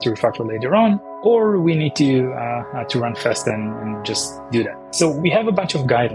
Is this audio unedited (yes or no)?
no